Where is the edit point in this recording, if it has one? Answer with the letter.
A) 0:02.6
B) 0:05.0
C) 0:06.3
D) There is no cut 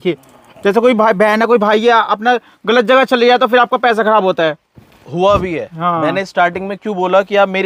D